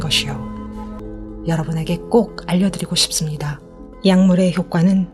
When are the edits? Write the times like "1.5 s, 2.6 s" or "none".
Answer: 1.0 s